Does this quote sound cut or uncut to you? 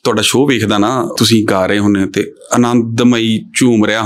cut